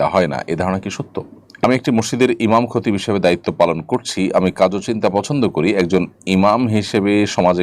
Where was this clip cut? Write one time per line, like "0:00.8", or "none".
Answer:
0:01.6

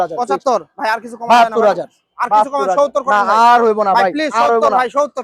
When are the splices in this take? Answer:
none

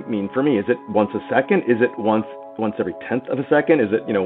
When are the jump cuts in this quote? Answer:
none

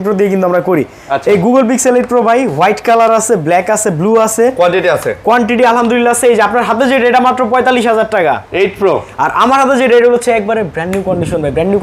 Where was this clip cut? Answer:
none

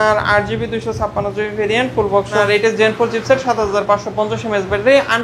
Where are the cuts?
0:02.3

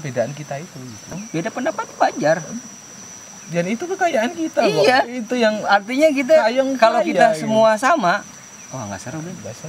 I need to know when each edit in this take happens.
0:01.0

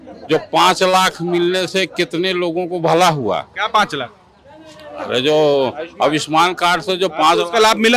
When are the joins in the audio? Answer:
none

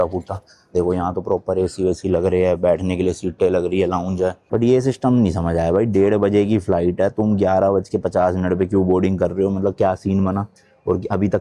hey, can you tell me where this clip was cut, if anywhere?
0:04.5

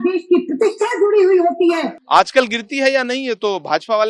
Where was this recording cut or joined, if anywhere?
0:02.0

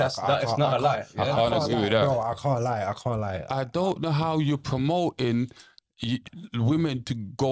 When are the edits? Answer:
0:03.5

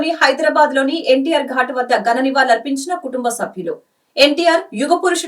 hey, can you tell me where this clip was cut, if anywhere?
none

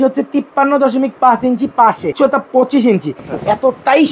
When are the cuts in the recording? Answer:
0:02.1
0:03.2

